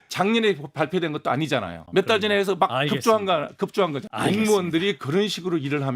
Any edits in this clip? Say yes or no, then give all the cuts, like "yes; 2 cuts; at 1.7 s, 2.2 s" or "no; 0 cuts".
yes; 2 cuts; at 1.8 s, 4.0 s